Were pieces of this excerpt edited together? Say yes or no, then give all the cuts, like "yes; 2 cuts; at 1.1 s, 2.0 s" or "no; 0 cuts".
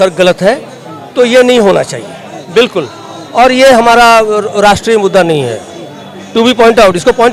no; 0 cuts